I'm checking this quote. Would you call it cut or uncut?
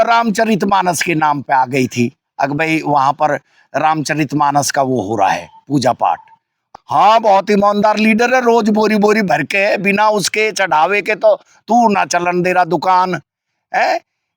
cut